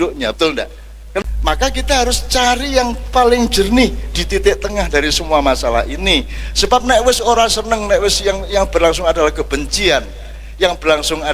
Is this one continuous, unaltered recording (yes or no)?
no